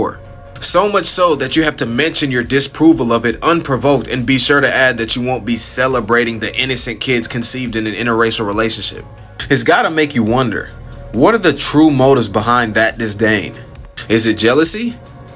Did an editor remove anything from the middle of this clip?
yes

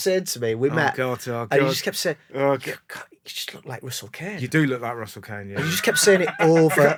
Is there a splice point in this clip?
no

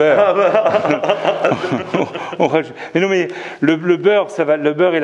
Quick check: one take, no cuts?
yes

